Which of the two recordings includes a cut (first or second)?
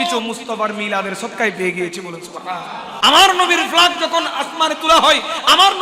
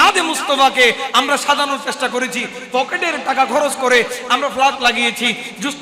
first